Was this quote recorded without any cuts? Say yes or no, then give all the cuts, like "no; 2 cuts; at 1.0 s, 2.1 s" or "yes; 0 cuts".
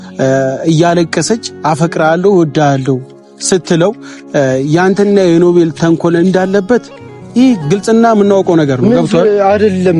yes; 0 cuts